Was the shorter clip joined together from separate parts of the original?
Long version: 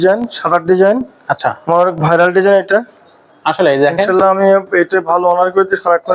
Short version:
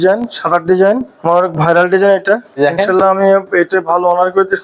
yes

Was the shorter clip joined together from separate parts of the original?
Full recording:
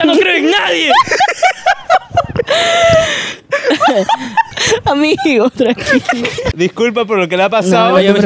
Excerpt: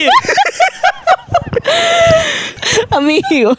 yes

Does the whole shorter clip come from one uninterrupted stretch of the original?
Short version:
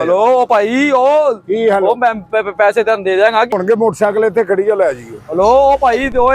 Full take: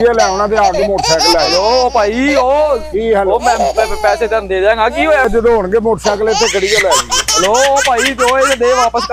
no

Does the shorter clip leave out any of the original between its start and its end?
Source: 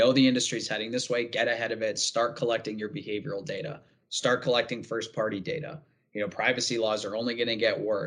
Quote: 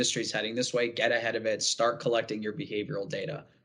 no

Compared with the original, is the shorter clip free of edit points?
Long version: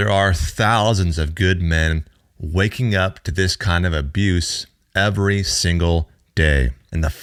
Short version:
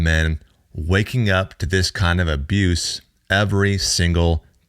yes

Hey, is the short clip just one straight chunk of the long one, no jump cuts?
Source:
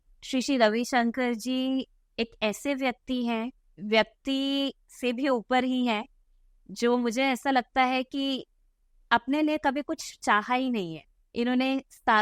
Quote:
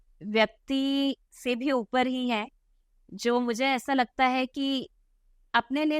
yes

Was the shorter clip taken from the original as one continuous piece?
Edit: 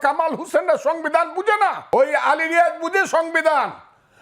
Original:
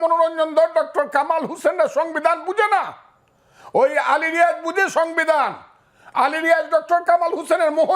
no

